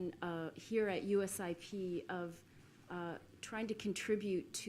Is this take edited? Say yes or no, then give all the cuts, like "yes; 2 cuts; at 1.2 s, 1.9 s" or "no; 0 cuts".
yes; 1 cut; at 2.0 s